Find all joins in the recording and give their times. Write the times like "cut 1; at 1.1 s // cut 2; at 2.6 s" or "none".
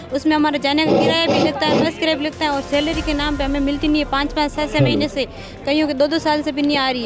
none